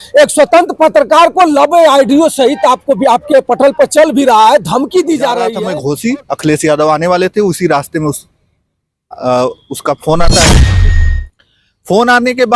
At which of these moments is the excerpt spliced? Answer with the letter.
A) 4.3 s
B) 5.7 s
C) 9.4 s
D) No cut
B